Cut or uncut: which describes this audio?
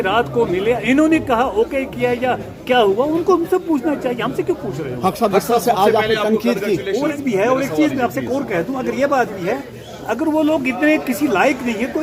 uncut